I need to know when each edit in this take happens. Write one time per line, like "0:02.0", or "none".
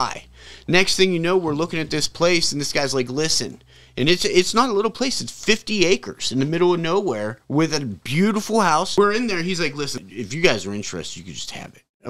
0:08.9
0:10.0